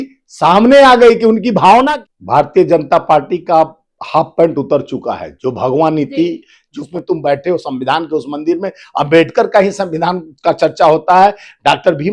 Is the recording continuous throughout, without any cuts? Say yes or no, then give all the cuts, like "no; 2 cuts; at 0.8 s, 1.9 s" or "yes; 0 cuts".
no; 2 cuts; at 1.9 s, 6.8 s